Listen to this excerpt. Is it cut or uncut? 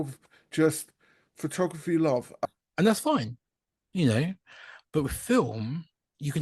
cut